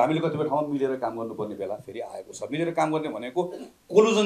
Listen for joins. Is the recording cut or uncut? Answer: uncut